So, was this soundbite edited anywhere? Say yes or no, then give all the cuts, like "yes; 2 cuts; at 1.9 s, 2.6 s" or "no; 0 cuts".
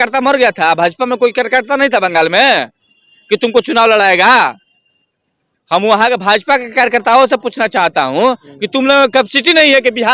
no; 0 cuts